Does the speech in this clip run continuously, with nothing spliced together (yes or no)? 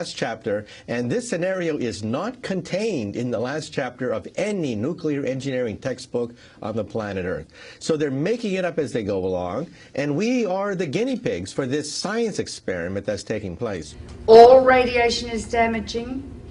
no